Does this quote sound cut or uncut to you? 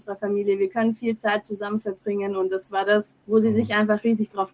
cut